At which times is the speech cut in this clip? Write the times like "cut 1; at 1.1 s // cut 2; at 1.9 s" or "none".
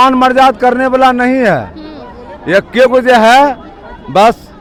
none